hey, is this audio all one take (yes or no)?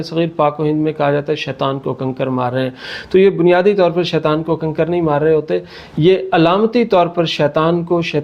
yes